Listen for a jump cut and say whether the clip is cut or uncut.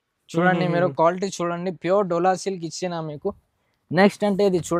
uncut